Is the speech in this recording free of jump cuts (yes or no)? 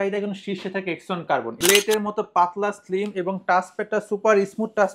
no